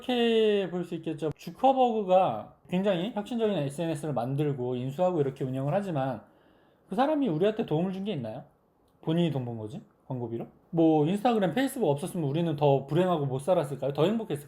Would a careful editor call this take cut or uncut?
cut